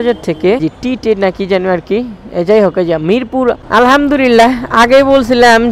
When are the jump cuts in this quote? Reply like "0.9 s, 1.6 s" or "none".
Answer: 3.6 s